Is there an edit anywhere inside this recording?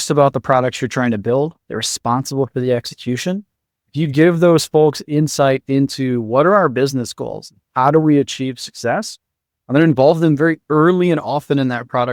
no; 0 cuts

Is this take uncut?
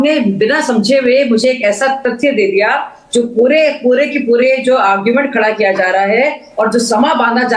yes; 0 cuts

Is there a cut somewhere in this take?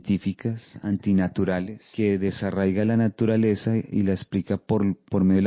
yes; 1 cut; at 1.8 s

